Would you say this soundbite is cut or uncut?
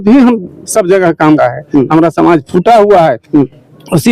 cut